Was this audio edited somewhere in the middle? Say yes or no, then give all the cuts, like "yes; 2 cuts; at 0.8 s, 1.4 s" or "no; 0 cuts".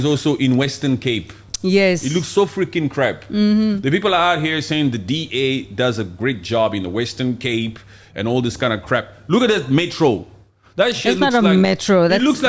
no; 0 cuts